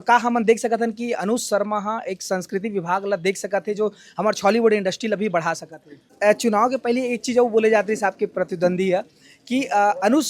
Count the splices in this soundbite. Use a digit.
1